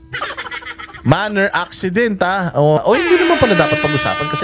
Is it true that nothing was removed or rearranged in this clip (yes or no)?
no